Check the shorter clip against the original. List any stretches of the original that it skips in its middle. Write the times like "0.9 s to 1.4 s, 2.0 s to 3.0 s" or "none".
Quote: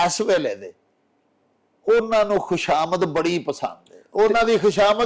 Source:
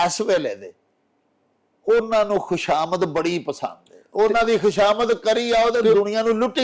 none